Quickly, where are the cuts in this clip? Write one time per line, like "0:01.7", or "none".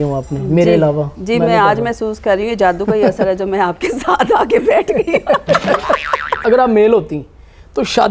0:06.4